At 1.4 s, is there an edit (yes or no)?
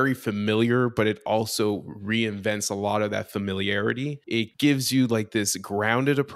no